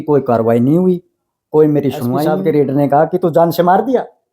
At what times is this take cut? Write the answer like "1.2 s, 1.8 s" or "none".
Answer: 2.2 s